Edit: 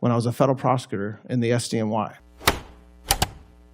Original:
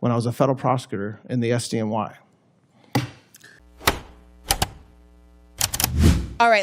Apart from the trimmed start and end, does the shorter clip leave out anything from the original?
yes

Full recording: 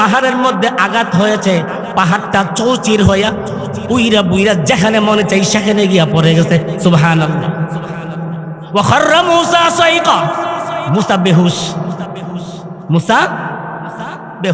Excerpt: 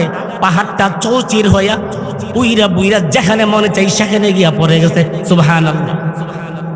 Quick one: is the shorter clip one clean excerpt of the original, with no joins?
yes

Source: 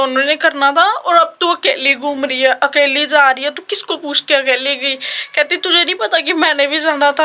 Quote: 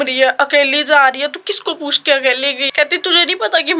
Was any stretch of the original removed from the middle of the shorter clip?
yes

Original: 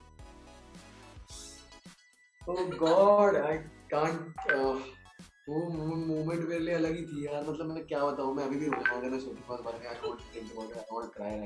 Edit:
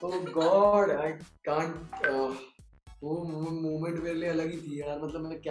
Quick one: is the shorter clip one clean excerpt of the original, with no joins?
yes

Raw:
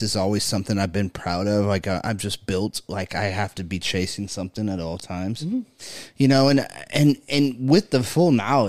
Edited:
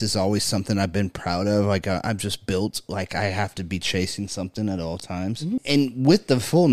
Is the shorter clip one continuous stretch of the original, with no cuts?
no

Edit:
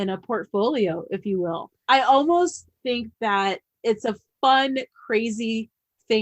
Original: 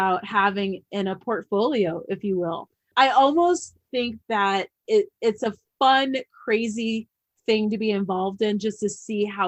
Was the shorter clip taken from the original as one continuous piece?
no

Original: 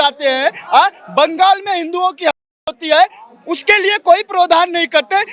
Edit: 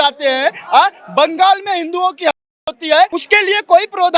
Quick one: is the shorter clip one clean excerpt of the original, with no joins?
no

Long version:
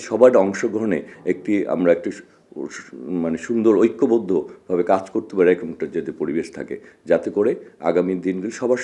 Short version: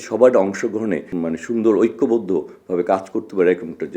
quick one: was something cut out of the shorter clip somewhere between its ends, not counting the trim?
yes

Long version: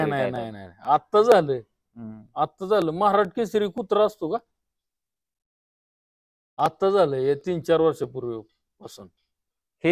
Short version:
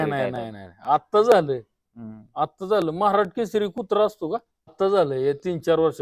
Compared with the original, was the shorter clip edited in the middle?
yes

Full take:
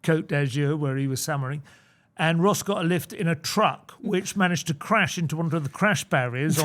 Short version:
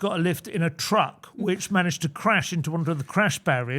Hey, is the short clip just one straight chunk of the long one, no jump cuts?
yes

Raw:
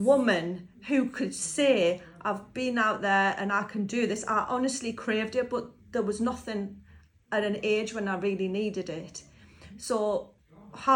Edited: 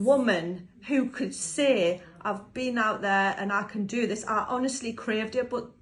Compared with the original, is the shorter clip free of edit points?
yes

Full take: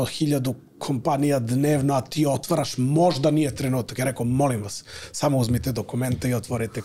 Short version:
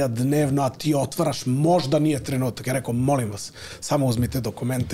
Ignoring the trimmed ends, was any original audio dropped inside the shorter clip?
no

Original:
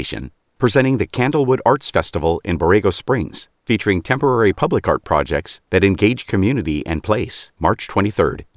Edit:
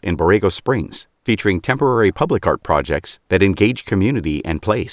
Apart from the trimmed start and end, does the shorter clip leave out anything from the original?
no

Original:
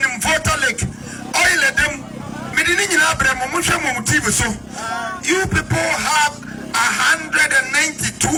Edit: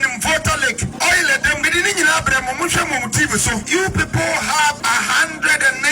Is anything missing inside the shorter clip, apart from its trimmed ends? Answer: yes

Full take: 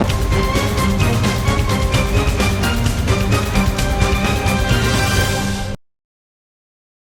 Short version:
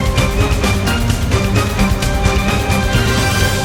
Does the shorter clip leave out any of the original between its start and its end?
no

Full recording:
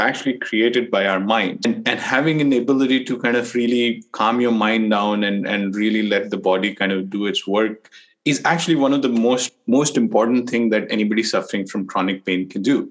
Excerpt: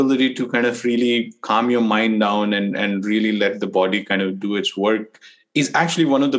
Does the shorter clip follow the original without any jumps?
yes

